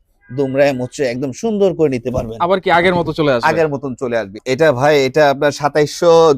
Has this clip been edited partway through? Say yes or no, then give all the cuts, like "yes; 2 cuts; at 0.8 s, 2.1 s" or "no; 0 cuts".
yes; 1 cut; at 4.4 s